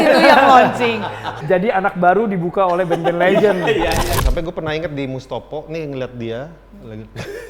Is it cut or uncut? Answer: cut